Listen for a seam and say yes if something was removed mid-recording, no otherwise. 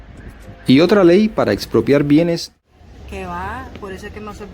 yes